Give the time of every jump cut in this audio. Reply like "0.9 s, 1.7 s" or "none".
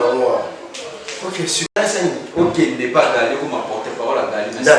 1.7 s

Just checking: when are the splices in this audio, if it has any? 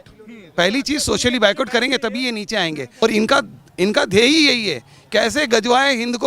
3.0 s

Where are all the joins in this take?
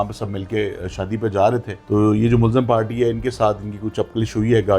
1.7 s

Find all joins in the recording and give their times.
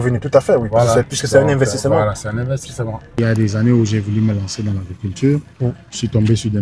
3.2 s

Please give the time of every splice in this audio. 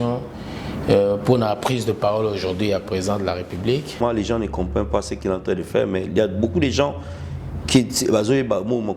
4.0 s

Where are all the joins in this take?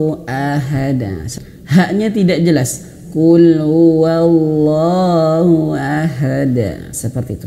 1.3 s

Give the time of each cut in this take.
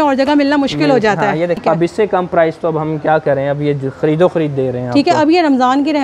1.2 s

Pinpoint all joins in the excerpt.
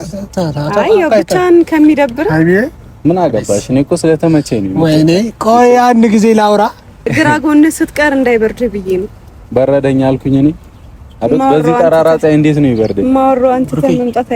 7.1 s

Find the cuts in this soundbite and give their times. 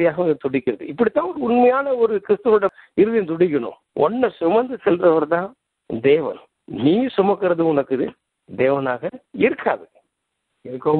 2.7 s, 3.8 s

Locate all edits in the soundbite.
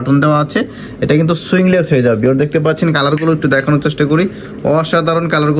none

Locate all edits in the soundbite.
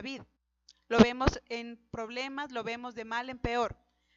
2.2 s

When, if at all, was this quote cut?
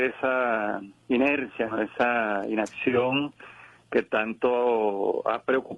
4.1 s

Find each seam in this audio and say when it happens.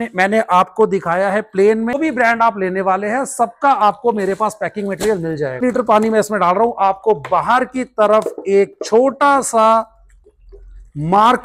1.9 s, 5.6 s

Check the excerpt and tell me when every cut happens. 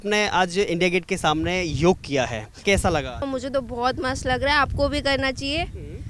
2.5 s, 3.2 s

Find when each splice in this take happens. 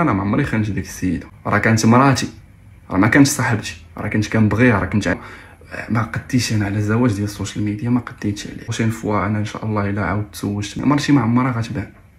1.3 s, 5.1 s, 8.7 s, 10.7 s

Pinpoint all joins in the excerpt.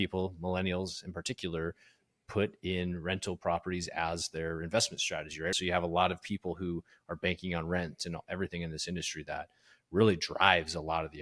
5.5 s

